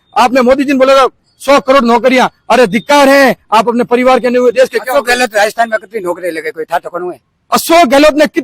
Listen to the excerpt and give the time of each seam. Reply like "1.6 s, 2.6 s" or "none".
none